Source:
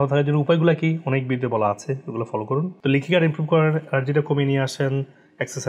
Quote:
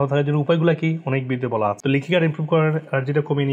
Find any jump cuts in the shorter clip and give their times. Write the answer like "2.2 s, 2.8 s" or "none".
1.8 s